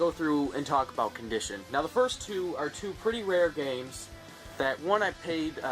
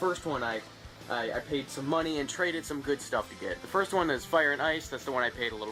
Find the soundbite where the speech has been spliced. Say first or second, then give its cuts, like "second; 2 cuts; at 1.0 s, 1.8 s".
first; 1 cut; at 4.0 s